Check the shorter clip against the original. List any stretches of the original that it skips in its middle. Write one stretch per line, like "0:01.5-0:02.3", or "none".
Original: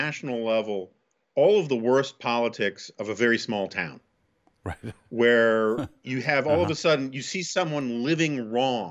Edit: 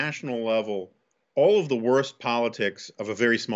none